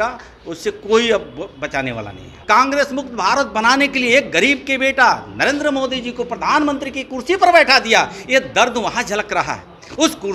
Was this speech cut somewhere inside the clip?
yes; 1 cut; at 2.4 s

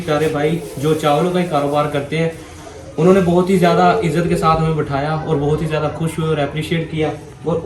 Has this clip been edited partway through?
no; 0 cuts

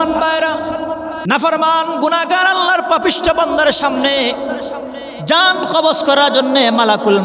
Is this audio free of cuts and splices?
no; 1 cut; at 1.1 s

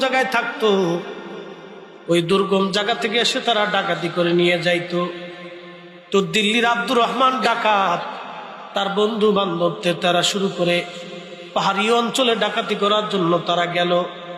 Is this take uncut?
yes; 0 cuts

